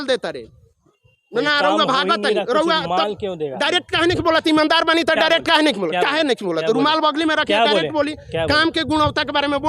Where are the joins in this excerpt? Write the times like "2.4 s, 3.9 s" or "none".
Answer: none